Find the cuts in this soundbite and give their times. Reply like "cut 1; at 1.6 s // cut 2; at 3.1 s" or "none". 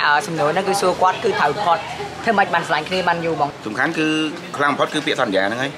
cut 1; at 3.6 s